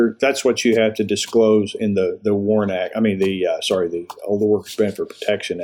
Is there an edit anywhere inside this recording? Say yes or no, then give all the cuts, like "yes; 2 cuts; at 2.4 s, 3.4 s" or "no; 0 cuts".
no; 0 cuts